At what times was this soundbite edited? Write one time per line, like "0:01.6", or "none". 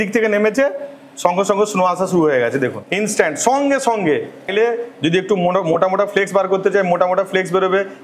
0:02.8
0:04.5